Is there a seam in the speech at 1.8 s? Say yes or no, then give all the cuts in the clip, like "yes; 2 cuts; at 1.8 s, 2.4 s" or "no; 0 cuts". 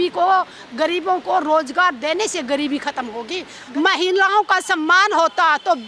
no; 1 cut; at 3.5 s